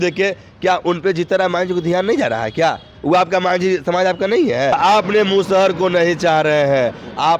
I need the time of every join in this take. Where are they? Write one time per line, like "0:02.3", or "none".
0:04.7